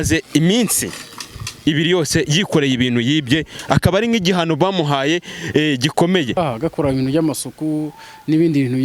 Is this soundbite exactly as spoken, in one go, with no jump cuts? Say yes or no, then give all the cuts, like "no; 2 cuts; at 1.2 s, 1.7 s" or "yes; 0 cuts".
no; 1 cut; at 6.4 s